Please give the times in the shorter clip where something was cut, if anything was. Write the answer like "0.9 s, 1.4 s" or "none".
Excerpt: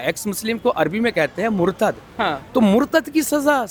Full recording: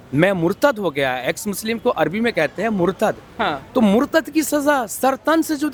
none

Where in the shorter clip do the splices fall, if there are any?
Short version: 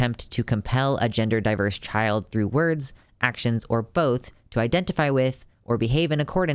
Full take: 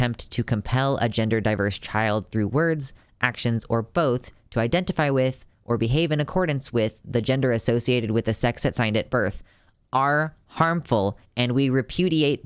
none

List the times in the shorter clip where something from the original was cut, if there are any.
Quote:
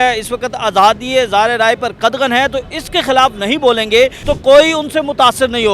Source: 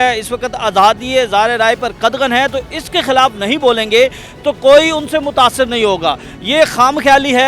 4.2 s

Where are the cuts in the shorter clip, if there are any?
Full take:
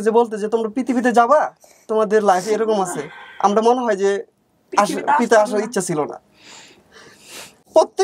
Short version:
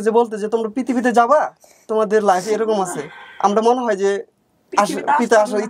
none

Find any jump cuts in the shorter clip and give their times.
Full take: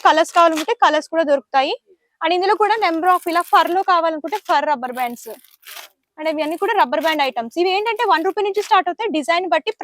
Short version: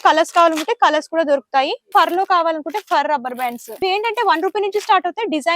1.9 s, 3.8 s

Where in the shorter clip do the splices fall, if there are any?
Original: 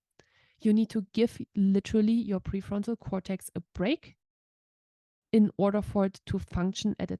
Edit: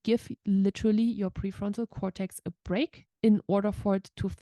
3.0 s

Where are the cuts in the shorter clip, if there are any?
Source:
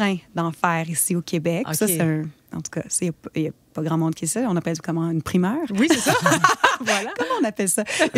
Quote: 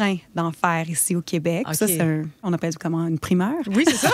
2.5 s

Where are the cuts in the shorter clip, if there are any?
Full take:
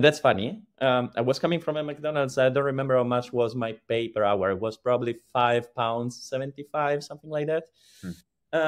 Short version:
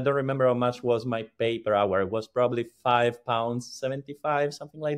none

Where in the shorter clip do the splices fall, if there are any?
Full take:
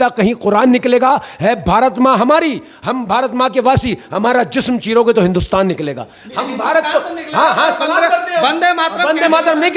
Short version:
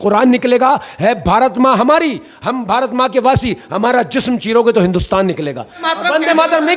5.9 s

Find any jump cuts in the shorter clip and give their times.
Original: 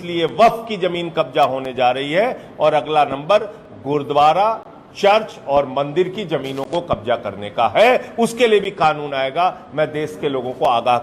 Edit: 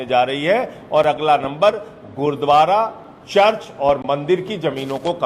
none

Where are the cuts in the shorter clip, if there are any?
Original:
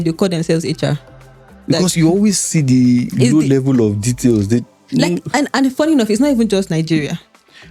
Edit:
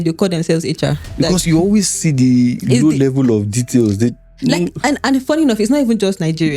1.0 s

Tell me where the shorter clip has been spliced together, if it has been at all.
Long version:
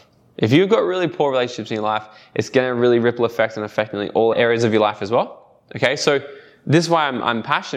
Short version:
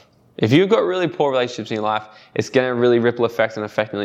none

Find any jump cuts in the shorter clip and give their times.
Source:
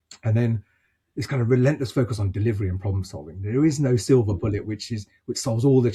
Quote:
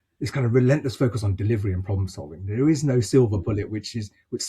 none

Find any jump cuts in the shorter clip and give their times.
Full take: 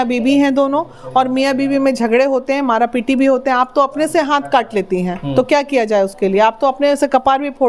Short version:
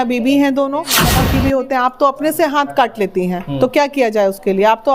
1.1 s

